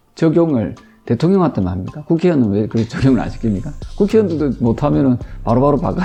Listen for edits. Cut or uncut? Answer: uncut